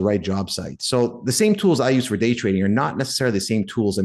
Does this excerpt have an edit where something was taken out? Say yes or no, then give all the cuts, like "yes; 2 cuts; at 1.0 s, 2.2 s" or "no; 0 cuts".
no; 0 cuts